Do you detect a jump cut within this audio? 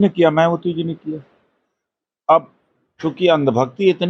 no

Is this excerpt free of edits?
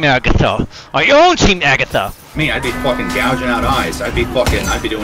no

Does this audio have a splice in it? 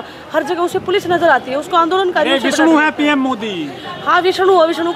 no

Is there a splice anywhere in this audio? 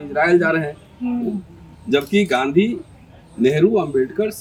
no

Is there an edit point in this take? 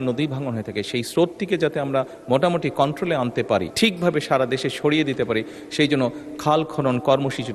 yes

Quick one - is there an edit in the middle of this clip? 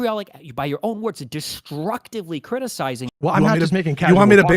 yes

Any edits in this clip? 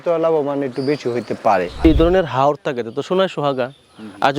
yes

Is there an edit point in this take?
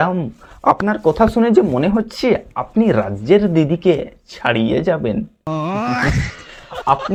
no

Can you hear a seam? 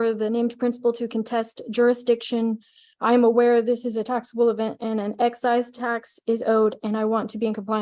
no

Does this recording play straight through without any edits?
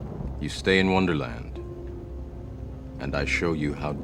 yes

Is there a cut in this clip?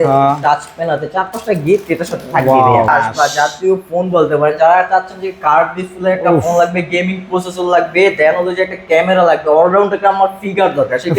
yes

